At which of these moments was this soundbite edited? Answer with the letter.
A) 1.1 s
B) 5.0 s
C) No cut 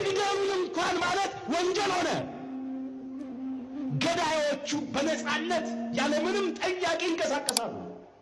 C